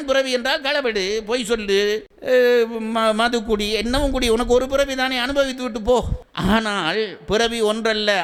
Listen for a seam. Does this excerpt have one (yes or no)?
no